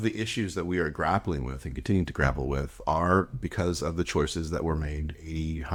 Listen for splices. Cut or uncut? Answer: uncut